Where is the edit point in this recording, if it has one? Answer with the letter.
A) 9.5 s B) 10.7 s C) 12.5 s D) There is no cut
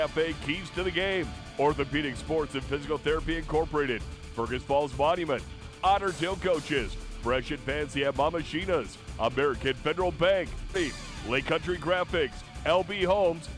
B